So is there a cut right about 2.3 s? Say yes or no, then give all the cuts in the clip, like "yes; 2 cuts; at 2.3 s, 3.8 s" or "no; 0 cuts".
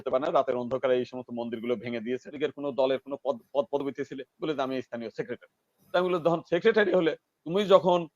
yes; 1 cut; at 2.3 s